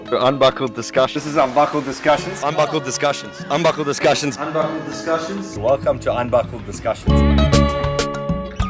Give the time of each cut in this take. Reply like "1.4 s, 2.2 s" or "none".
none